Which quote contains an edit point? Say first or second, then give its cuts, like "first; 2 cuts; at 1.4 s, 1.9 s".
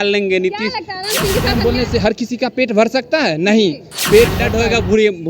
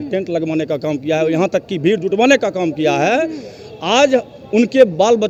first; 2 cuts; at 1.5 s, 4.4 s